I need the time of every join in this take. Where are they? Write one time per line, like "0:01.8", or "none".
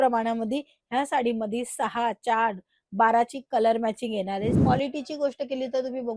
0:04.6

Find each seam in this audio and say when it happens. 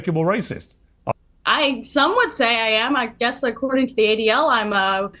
0:01.1

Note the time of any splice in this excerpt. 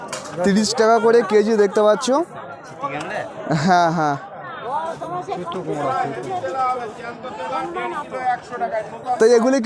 none

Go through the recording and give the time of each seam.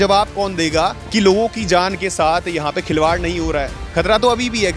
0:01.0
0:03.9

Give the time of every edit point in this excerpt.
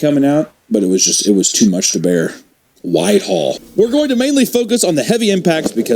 0:03.6

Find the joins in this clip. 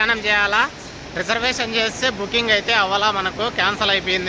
none

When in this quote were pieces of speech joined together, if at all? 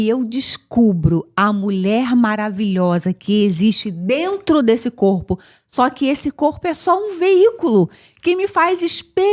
none

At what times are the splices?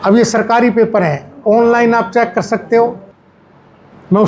0:03.1

